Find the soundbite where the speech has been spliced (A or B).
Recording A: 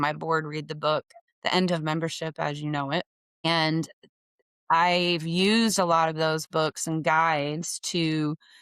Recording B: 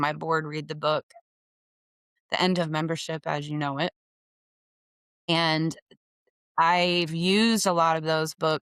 A